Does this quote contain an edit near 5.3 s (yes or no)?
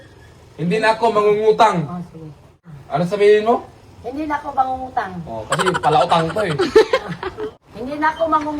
no